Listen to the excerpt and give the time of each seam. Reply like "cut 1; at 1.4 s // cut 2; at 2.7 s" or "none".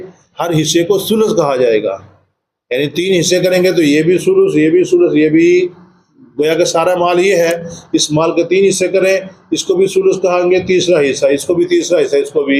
none